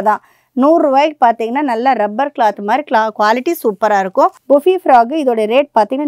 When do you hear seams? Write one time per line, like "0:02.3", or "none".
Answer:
0:04.3